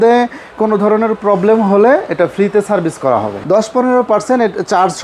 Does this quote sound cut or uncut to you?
cut